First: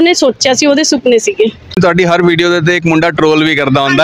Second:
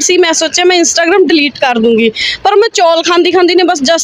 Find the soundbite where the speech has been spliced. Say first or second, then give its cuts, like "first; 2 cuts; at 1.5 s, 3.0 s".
first; 1 cut; at 1.8 s